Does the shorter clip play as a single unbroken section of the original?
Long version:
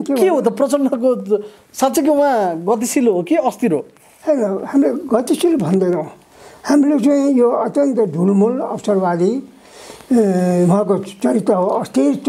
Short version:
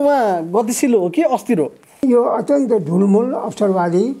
no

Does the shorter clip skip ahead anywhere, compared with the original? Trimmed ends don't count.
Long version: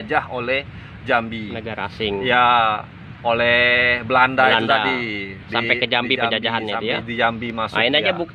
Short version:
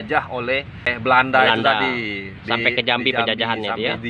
yes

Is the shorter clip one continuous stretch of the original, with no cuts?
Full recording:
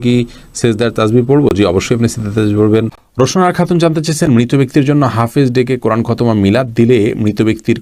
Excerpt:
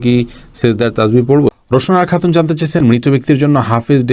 no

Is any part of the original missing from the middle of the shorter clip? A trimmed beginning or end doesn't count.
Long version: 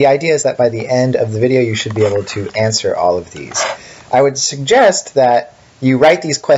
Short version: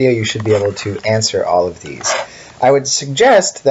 no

